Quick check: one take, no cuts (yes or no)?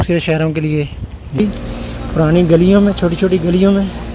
no